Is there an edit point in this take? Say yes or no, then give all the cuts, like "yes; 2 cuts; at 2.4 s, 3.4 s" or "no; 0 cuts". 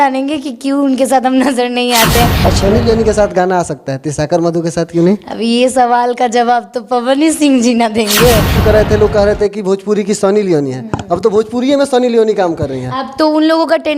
yes; 2 cuts; at 2.4 s, 8.6 s